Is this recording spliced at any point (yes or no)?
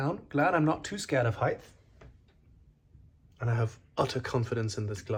no